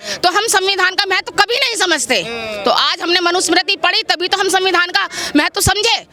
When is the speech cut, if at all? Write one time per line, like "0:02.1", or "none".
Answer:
none